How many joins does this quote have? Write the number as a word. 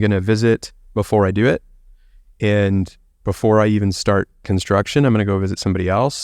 zero